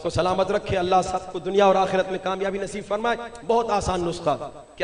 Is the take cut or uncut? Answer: uncut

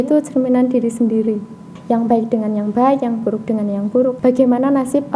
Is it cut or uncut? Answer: cut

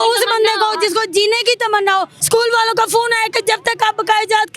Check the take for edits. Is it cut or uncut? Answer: cut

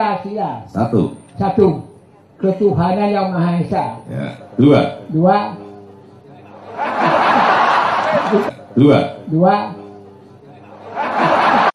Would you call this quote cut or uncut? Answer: cut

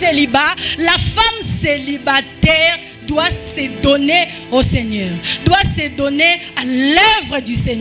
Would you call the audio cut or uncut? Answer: uncut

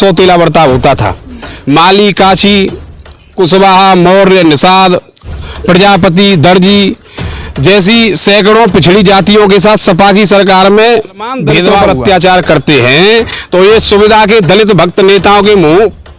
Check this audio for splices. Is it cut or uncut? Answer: cut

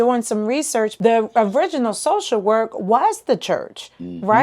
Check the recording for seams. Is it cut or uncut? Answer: cut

